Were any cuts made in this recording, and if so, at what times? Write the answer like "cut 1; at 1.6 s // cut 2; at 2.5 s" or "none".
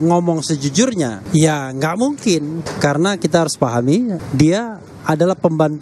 cut 1; at 1.2 s // cut 2; at 2.6 s // cut 3; at 4.2 s